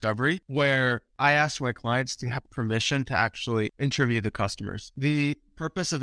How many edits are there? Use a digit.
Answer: 2